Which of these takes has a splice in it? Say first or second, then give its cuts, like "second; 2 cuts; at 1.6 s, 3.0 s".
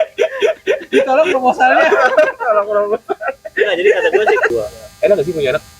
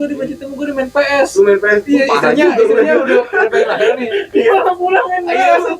first; 1 cut; at 4.5 s